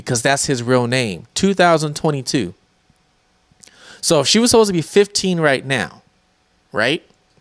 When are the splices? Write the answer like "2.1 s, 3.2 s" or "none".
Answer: none